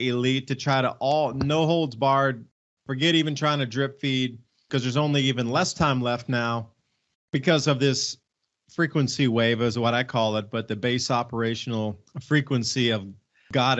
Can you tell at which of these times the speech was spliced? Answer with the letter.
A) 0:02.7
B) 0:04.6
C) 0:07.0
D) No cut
B